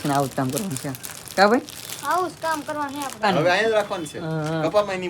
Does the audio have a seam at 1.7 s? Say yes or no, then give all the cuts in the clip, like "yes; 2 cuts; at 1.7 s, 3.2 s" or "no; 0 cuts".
no; 1 cut; at 3.3 s